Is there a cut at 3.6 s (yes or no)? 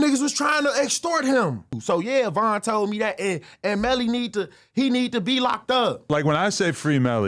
no